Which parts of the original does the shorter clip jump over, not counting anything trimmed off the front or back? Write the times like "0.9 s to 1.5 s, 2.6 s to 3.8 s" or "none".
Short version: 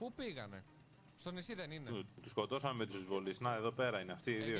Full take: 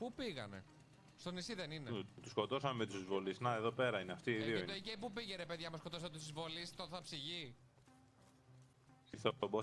none